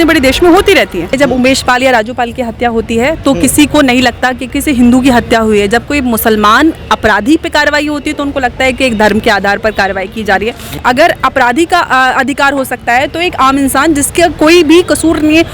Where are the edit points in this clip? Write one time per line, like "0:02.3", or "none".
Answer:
0:01.1
0:04.5
0:10.7